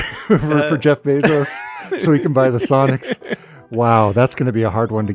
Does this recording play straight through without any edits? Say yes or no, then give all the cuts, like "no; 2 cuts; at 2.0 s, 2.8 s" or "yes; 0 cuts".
yes; 0 cuts